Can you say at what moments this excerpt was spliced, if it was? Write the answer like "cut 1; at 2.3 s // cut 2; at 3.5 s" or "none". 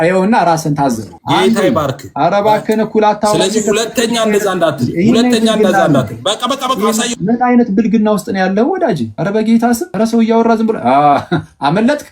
cut 1; at 1.1 s // cut 2; at 9.1 s // cut 3; at 9.9 s